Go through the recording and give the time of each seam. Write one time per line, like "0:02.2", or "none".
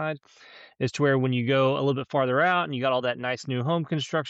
none